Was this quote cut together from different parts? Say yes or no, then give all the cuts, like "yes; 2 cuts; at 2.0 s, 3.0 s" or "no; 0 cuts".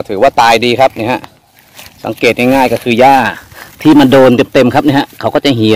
no; 0 cuts